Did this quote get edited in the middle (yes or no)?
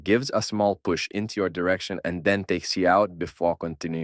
no